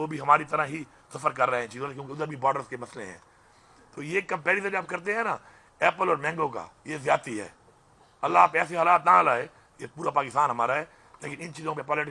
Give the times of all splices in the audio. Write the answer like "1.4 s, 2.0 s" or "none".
none